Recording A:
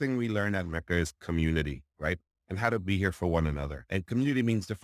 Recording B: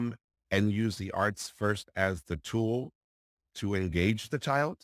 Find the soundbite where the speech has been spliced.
A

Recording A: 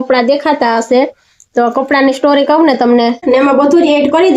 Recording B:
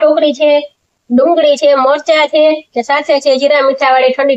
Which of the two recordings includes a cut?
A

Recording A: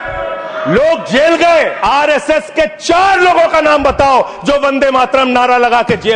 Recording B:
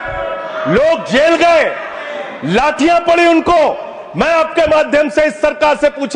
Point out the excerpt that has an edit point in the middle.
A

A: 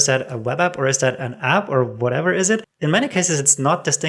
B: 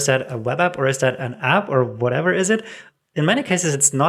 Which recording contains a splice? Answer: A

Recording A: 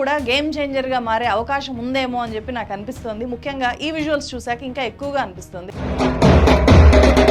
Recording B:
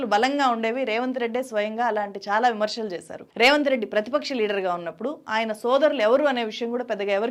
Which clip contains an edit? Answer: A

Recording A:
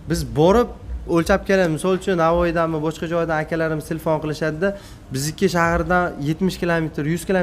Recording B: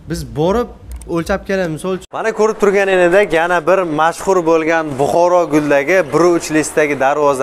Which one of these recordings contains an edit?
B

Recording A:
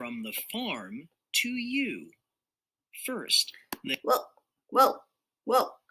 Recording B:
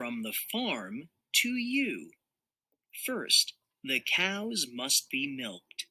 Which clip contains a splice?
B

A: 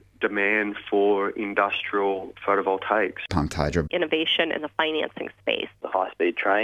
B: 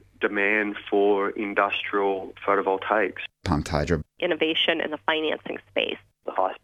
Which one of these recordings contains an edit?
A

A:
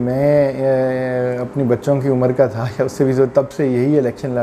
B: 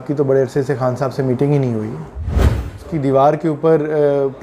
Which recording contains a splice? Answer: B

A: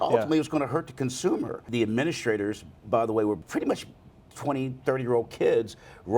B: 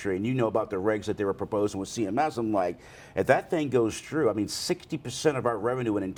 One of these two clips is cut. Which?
A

